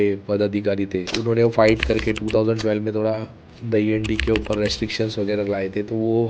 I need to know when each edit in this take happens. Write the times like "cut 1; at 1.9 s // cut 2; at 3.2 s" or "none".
cut 1; at 1.1 s